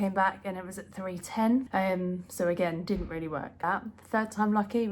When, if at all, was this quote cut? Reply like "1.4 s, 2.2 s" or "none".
1.7 s, 3.6 s